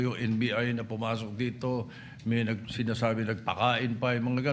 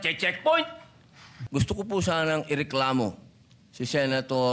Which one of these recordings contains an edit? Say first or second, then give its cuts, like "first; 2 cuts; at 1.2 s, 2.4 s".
second; 1 cut; at 1.4 s